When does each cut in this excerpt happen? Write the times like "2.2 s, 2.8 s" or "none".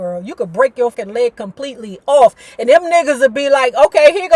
0.9 s